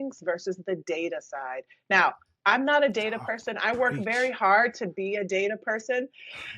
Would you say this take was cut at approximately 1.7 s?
no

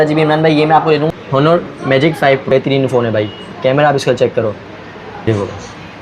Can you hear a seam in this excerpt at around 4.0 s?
no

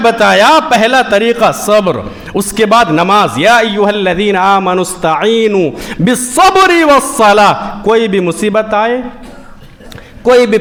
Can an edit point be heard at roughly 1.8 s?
no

